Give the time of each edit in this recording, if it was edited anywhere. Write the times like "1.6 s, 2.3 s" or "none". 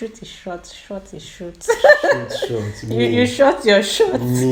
none